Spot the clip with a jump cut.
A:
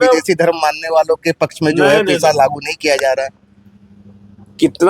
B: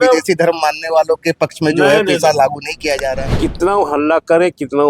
B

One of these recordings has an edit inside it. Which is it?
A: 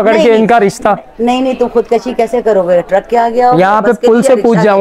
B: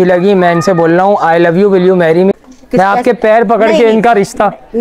B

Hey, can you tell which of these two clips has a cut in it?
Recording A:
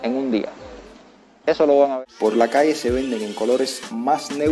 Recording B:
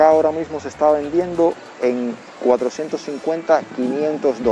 A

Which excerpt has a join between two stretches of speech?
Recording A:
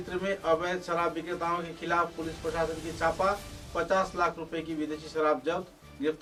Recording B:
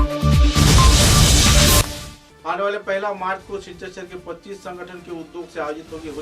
B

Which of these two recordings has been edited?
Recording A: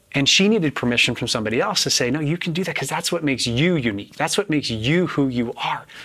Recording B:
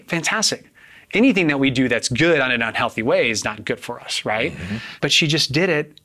B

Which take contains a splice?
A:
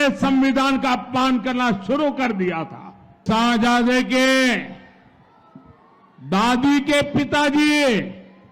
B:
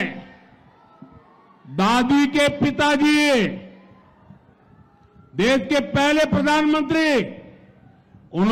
A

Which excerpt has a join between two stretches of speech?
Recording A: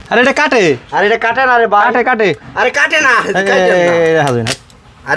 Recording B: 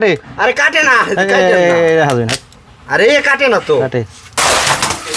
B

